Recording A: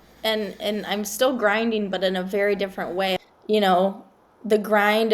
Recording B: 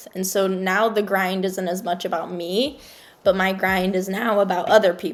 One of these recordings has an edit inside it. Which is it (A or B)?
A